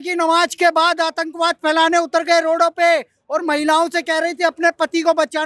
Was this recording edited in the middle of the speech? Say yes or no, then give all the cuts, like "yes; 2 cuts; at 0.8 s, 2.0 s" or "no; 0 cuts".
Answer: no; 0 cuts